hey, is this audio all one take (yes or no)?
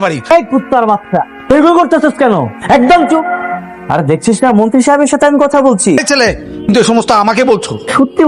no